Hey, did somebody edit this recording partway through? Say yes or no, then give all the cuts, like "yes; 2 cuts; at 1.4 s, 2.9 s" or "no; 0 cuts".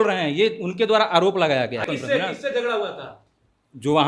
yes; 1 cut; at 1.8 s